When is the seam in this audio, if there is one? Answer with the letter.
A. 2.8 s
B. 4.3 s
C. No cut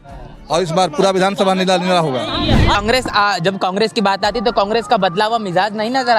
A